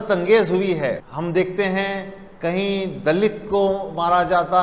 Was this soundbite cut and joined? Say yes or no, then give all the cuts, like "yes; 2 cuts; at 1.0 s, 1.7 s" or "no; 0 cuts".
yes; 1 cut; at 1.1 s